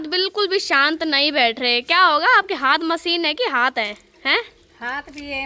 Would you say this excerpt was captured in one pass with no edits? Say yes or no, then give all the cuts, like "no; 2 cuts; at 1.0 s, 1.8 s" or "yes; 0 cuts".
yes; 0 cuts